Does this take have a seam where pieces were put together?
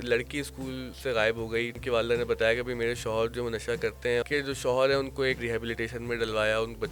yes; 4 cuts; at 0.9 s, 1.8 s, 4.2 s, 5.4 s

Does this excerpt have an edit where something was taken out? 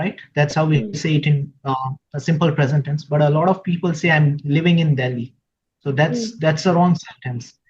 no; 0 cuts

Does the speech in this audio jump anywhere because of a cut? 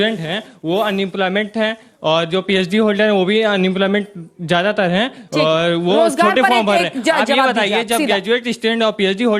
no; 0 cuts

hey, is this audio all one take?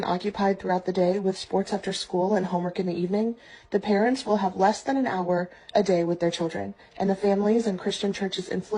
yes; 0 cuts

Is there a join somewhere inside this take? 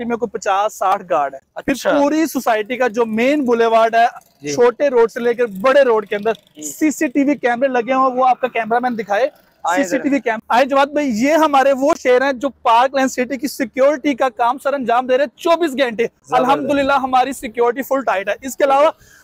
no; 0 cuts

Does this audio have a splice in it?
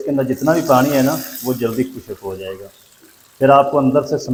no; 0 cuts

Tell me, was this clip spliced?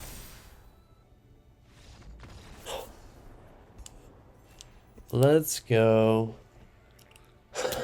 yes; 1 cut; at 1.0 s

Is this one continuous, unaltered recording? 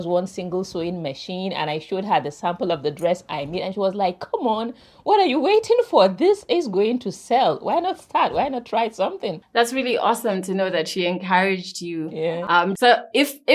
yes; 0 cuts

